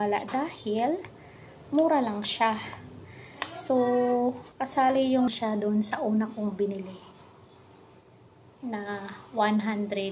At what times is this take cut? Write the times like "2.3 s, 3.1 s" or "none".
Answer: 5.3 s